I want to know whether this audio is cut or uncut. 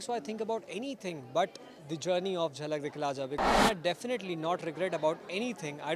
cut